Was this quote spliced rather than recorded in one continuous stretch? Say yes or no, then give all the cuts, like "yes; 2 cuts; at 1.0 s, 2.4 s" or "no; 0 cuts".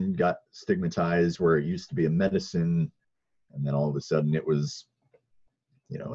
no; 0 cuts